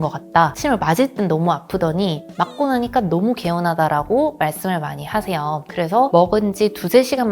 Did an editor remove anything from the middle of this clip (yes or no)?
yes